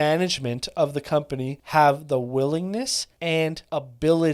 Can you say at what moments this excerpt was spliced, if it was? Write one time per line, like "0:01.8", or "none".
0:01.6
0:03.5